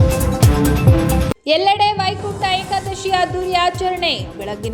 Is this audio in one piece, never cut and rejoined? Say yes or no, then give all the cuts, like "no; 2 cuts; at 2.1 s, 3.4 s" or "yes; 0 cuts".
no; 1 cut; at 1.1 s